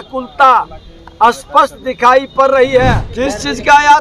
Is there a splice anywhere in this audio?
yes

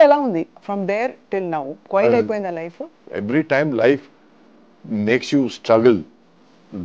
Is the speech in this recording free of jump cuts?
no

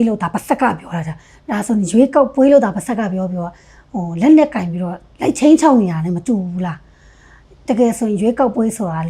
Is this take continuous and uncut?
yes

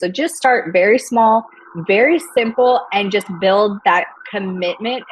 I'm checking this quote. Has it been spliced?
no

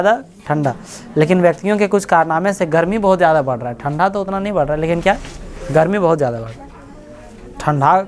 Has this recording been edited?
no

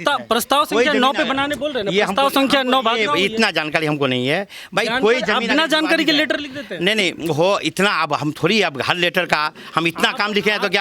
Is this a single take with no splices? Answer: yes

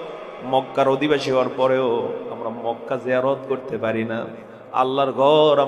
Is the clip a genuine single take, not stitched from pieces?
yes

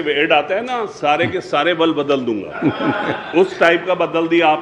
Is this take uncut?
yes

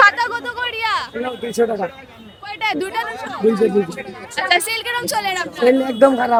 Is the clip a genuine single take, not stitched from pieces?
yes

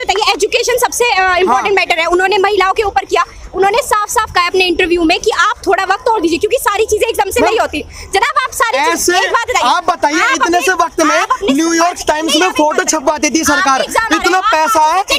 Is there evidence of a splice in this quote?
no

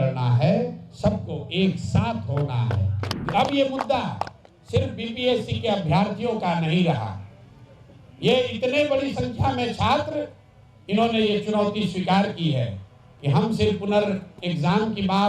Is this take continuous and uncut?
no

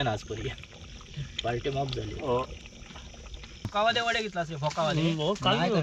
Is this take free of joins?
no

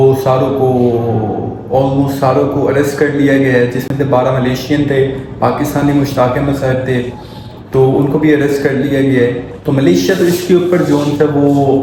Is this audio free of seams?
yes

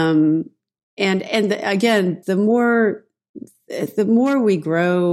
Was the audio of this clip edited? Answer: no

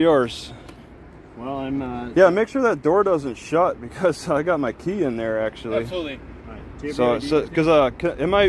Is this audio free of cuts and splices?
yes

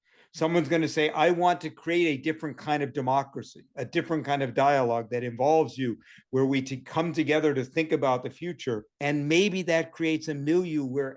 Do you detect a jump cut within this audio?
yes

